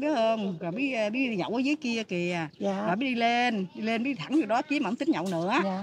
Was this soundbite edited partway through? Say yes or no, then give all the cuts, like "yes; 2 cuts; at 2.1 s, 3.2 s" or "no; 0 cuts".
no; 0 cuts